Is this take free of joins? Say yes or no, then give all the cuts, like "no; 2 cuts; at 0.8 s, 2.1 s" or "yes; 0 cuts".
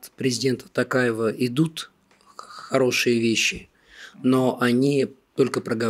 yes; 0 cuts